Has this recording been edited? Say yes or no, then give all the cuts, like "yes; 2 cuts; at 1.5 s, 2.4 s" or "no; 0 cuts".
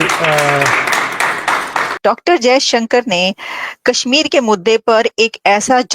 no; 0 cuts